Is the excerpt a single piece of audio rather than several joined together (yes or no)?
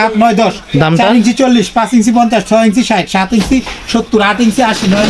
yes